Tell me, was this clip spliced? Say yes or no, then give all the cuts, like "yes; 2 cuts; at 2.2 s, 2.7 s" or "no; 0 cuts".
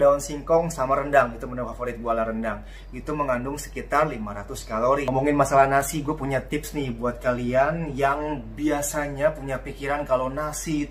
yes; 1 cut; at 5.1 s